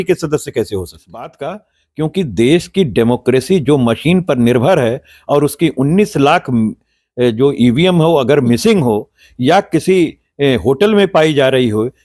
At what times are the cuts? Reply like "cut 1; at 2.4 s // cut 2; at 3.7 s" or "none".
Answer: cut 1; at 1.4 s